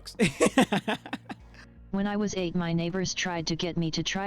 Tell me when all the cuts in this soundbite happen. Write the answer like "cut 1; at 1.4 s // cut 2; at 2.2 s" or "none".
cut 1; at 1.8 s